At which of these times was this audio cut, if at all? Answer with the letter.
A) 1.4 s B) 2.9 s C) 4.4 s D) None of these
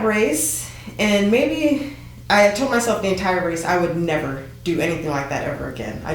D